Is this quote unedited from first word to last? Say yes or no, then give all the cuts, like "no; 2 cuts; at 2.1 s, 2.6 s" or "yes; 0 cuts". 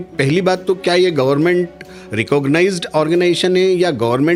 yes; 0 cuts